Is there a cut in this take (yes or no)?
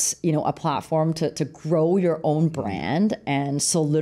no